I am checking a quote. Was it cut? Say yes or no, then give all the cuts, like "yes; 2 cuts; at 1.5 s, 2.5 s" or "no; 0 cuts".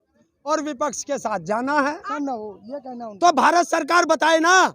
yes; 1 cut; at 2.0 s